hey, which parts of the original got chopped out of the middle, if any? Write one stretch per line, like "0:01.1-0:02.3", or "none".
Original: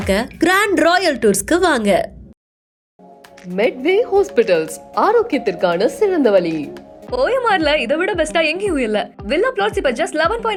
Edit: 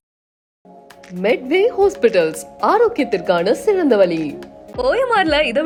none